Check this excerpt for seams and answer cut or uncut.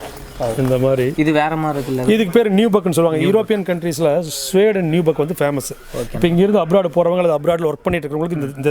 cut